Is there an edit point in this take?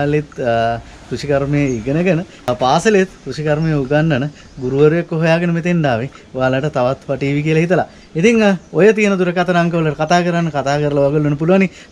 yes; 1 cut; at 2.5 s

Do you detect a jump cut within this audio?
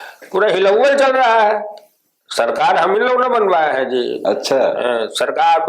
no; 0 cuts

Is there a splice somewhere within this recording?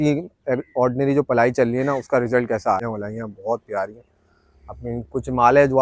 yes; 1 cut; at 2.9 s

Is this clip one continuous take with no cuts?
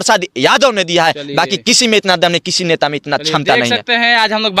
yes; 0 cuts

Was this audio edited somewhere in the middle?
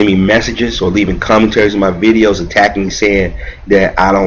no; 0 cuts

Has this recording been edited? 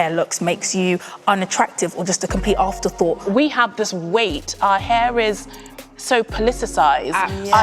yes; 1 cut; at 3.2 s

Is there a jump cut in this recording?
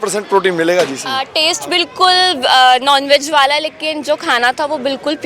yes; 1 cut; at 1.2 s

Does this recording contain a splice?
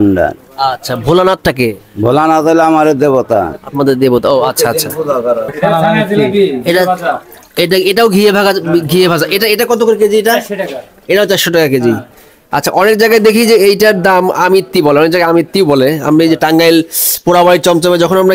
yes; 1 cut; at 5.5 s

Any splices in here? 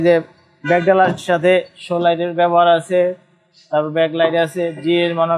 no; 0 cuts

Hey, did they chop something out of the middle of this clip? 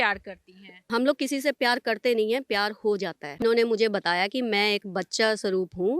yes; 1 cut; at 3.4 s

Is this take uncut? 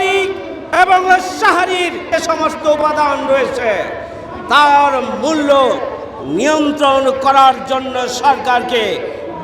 no; 1 cut; at 2.1 s

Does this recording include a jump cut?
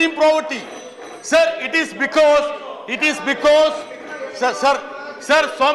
no; 0 cuts

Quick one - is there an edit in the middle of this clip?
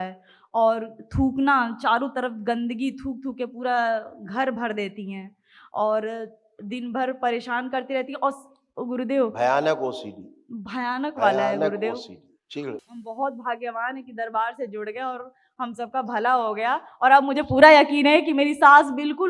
yes; 1 cut; at 12.9 s

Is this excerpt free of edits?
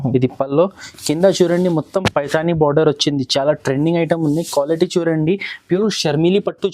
no; 1 cut; at 5.8 s

